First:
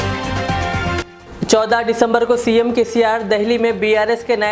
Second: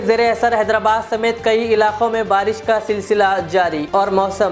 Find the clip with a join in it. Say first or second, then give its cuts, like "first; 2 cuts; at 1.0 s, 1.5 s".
first; 1 cut; at 0.9 s